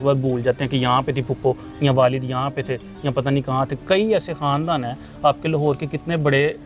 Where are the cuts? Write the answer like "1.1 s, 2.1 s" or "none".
none